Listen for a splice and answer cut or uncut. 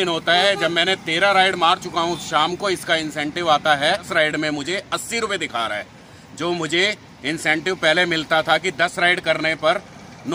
cut